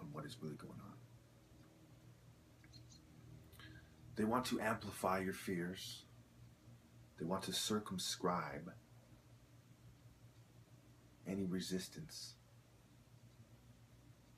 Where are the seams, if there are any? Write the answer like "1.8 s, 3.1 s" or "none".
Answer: 4.0 s